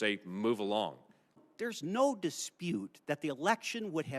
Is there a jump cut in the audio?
yes; 1 cut; at 1.5 s

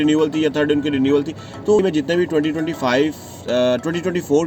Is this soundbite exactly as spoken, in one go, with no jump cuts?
no; 1 cut; at 1.8 s

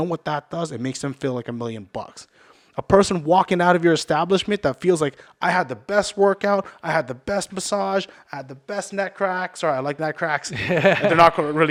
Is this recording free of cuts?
yes; 0 cuts

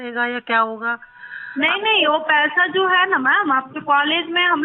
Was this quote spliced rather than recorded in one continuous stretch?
no; 0 cuts

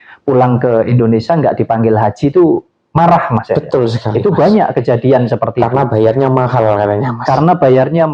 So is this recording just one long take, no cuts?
yes; 0 cuts

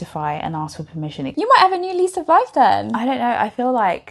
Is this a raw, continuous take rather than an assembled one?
no; 1 cut; at 1.3 s

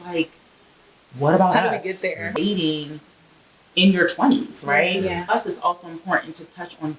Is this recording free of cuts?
no; 2 cuts; at 2.3 s, 5.3 s

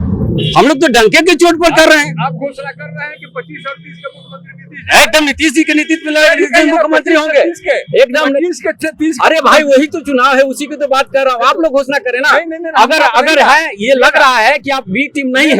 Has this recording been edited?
no; 0 cuts

